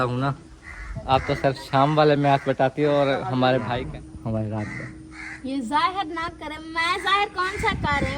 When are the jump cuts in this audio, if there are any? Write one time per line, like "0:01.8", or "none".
0:03.8